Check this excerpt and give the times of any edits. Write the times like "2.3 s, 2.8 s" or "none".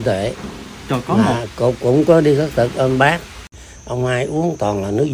3.5 s